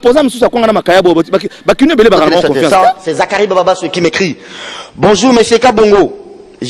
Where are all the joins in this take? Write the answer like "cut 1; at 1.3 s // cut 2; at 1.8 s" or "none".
cut 1; at 2.9 s